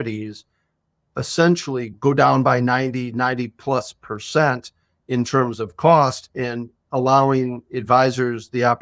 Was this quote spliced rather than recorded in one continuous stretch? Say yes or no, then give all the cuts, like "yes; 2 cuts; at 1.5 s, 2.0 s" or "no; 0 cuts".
no; 0 cuts